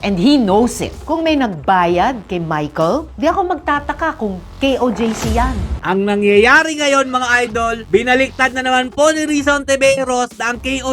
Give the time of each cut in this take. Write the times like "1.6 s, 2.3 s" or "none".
5.7 s